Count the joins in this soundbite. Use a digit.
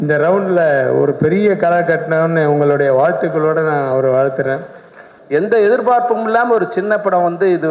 1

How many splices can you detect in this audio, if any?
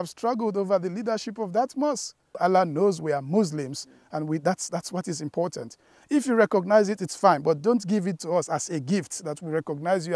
1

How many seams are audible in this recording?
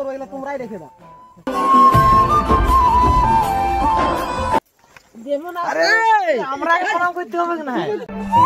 1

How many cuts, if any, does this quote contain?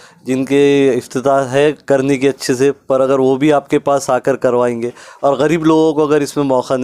0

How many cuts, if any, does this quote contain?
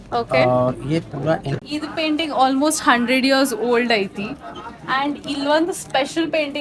1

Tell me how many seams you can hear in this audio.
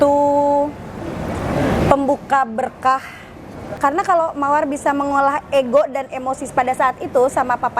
1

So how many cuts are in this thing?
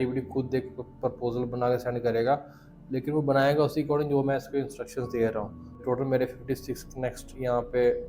1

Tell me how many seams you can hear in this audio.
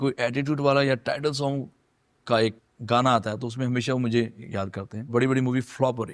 2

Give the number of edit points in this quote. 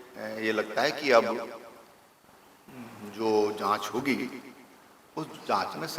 0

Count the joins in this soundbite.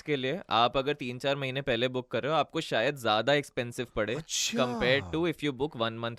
0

